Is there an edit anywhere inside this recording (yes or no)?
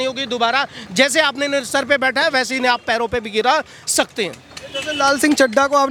no